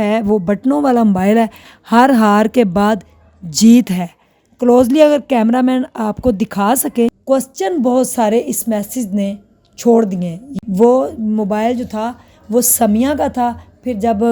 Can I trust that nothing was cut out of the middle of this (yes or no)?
no